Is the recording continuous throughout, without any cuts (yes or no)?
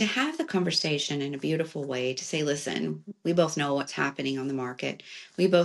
yes